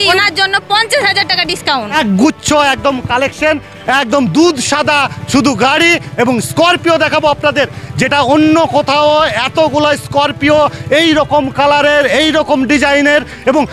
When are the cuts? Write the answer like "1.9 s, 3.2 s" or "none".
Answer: 1.9 s